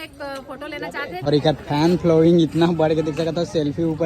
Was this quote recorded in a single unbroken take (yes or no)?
no